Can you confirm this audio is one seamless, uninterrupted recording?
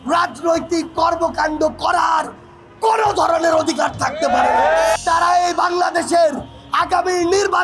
no; 1 cut; at 5.0 s

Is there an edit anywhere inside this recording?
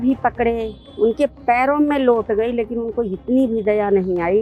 no; 0 cuts

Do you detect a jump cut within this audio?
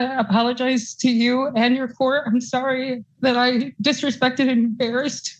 no; 0 cuts

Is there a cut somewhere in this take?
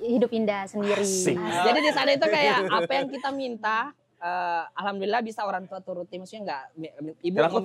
yes; 1 cut; at 1.5 s

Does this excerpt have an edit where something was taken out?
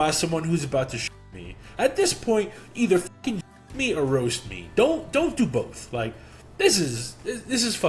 no; 0 cuts

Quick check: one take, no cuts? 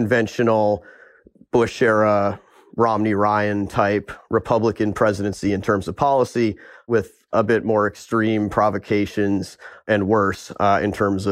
no; 1 cut; at 6.9 s

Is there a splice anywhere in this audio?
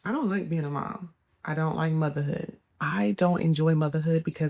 yes; 1 cut; at 2.6 s

